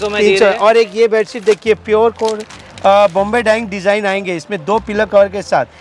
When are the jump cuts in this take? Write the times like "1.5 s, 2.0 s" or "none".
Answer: none